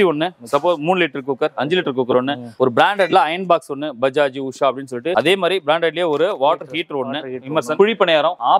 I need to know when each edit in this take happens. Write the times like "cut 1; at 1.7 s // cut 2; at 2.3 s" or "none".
cut 1; at 2.4 s // cut 2; at 5.1 s